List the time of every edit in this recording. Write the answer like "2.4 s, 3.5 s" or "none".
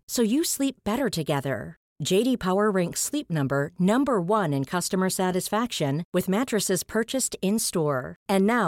none